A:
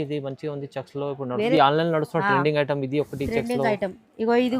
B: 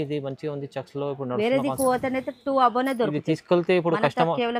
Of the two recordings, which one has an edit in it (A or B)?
A